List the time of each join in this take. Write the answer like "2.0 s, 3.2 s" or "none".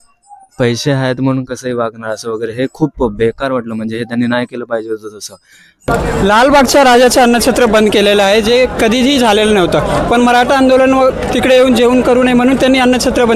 5.9 s